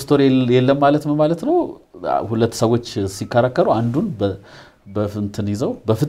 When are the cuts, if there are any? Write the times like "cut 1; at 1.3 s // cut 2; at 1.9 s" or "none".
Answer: none